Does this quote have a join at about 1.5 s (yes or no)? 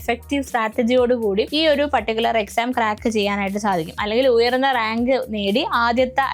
yes